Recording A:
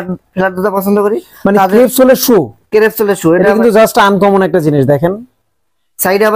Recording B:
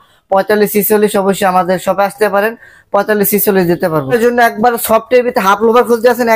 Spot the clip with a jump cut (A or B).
B